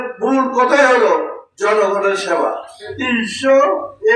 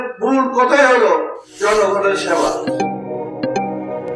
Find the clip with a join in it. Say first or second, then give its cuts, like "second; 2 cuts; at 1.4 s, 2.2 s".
first; 1 cut; at 2.8 s